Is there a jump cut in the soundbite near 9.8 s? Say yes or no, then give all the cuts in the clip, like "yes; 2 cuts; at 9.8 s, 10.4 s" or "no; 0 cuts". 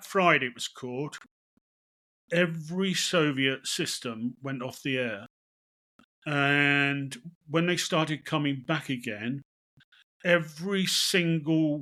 no; 0 cuts